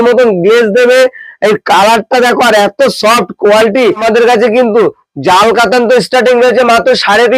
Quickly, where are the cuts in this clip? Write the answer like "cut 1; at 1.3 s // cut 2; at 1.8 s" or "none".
cut 1; at 4.0 s